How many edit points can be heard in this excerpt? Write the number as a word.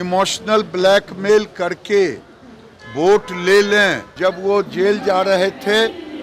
one